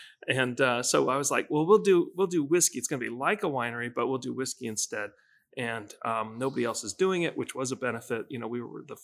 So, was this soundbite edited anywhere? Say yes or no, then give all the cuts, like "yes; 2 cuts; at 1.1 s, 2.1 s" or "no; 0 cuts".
no; 0 cuts